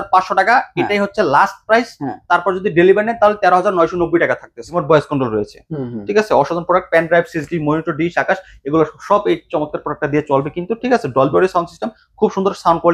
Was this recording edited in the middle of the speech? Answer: yes; 1 cut; at 4.7 s

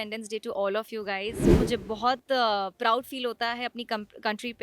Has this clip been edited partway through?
yes; 1 cut; at 1.5 s

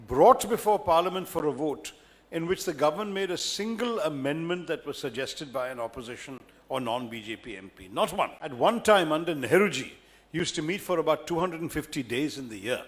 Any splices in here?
yes; 1 cut; at 8.4 s

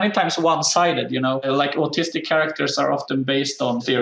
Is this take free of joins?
yes; 0 cuts

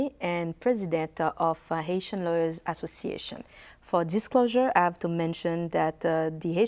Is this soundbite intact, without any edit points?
yes; 0 cuts

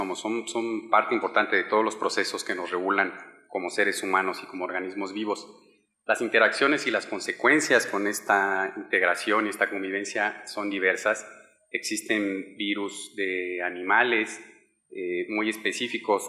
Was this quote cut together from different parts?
yes; 1 cut; at 1.7 s

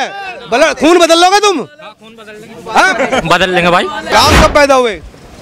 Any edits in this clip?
yes; 1 cut; at 4.1 s

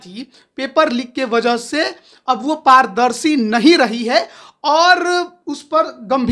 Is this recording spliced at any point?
no; 0 cuts

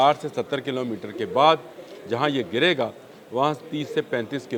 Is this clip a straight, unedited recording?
yes; 0 cuts

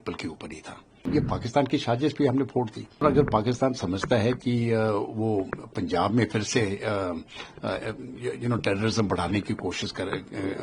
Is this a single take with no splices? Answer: no; 2 cuts; at 1.0 s, 3.0 s

